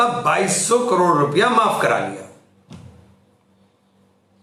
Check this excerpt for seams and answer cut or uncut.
uncut